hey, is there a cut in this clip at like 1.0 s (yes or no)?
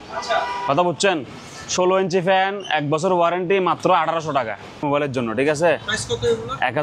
no